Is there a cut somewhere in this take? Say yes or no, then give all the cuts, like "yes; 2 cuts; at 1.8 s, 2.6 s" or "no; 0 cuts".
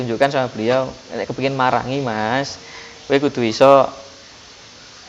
no; 0 cuts